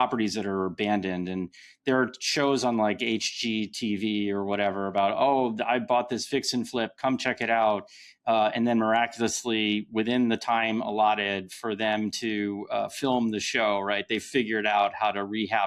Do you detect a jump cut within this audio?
no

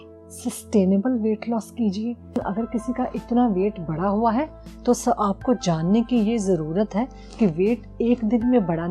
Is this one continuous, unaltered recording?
no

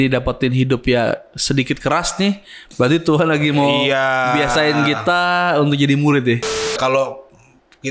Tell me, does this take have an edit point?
yes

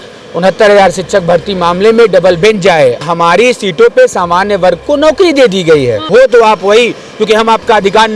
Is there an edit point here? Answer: yes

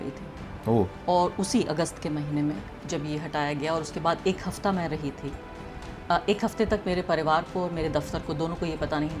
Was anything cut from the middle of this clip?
no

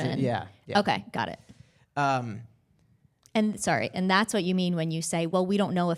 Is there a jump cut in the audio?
no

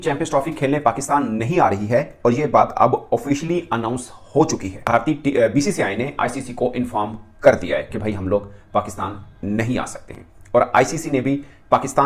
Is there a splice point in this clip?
no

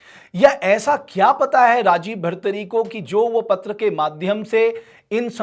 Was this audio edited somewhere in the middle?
no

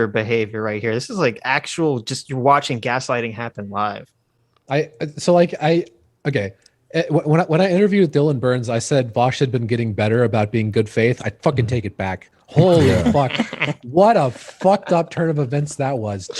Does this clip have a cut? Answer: no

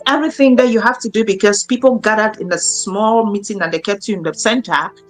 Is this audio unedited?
yes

